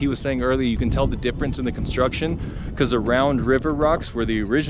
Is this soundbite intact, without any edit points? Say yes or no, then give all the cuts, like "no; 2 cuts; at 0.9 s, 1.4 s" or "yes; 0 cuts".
yes; 0 cuts